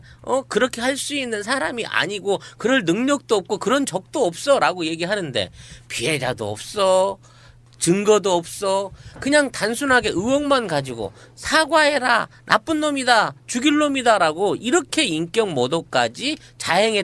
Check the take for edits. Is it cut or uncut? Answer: cut